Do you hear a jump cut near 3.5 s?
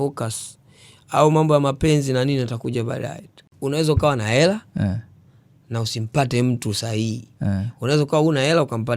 yes; 1 cut; at 3.5 s

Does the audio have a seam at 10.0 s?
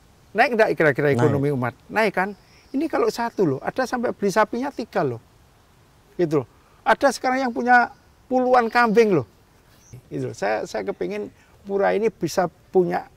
yes; 1 cut; at 10.0 s

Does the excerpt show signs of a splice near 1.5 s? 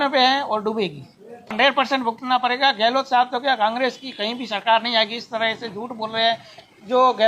yes; 1 cut; at 1.5 s

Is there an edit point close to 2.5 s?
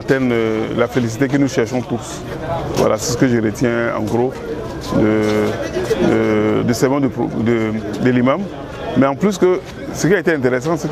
no; 0 cuts

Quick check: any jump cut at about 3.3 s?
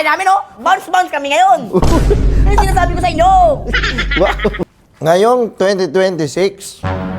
no; 1 cut; at 4.8 s

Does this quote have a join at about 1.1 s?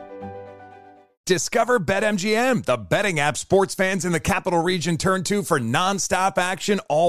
yes; 1 cut; at 1.1 s

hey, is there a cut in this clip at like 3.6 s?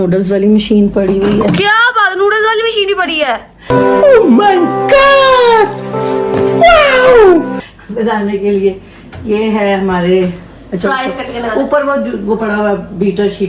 no; 0 cuts

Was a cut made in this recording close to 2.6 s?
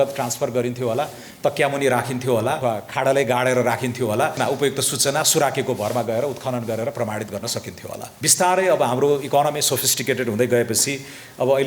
yes; 3 cuts; at 2.6 s, 4.4 s, 8.1 s

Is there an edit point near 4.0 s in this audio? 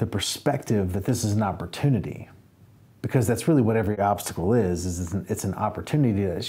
yes; 1 cut; at 4.0 s

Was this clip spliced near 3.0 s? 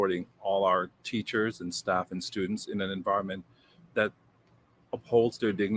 yes; 1 cut; at 3.0 s

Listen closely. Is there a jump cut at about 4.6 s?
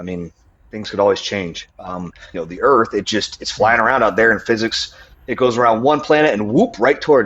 no; 1 cut; at 2.3 s

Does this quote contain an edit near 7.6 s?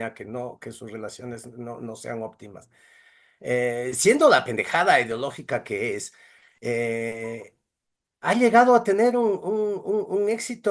no; 0 cuts

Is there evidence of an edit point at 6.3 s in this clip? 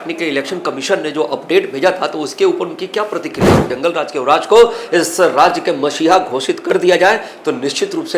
no; 1 cut; at 3.7 s

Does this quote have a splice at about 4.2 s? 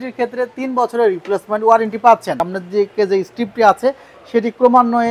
no; 1 cut; at 2.4 s

